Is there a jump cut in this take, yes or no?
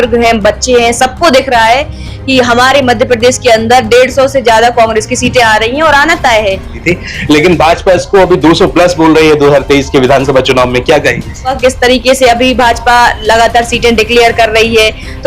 yes